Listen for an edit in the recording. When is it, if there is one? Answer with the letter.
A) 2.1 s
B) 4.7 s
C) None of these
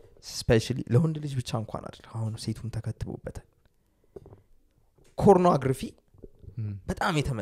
C